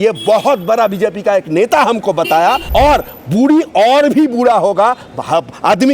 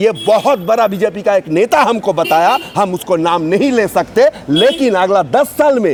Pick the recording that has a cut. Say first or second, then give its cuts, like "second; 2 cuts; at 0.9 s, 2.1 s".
first; 1 cut; at 2.6 s